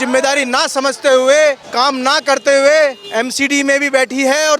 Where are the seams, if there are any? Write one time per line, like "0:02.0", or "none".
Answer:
0:01.7
0:03.0